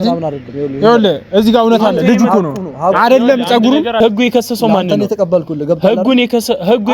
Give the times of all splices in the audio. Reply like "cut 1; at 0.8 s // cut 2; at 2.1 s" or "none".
cut 1; at 4.0 s